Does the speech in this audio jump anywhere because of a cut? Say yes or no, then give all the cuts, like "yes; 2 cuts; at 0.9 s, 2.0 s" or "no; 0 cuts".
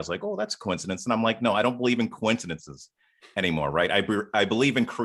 no; 0 cuts